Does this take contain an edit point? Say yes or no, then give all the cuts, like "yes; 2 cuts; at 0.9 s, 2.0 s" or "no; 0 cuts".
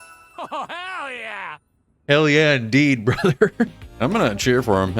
yes; 1 cut; at 3.8 s